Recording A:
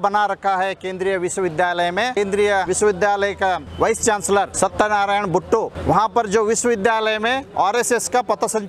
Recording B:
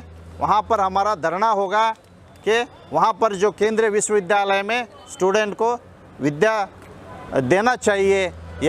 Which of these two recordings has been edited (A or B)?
A